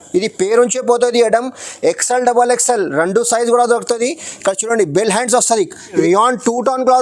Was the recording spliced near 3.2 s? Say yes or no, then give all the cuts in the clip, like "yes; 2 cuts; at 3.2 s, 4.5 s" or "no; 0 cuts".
no; 1 cut; at 5.9 s